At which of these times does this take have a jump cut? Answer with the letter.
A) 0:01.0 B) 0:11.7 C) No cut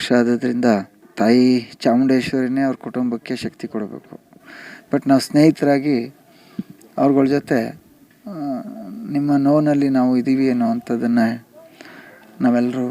A